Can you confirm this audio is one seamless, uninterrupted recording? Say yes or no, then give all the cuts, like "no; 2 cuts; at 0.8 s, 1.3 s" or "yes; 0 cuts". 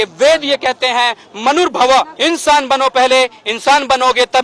no; 1 cut; at 2.1 s